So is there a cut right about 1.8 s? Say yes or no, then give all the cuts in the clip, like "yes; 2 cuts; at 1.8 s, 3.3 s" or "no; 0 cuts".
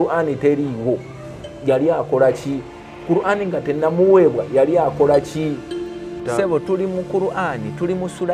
no; 1 cut; at 6.1 s